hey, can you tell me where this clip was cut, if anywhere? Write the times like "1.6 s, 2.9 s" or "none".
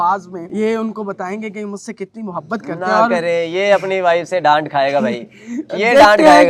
none